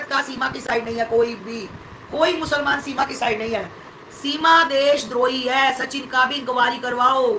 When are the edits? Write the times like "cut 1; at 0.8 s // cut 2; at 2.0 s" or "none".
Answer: none

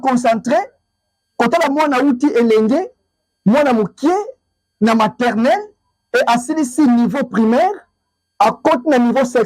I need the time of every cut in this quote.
none

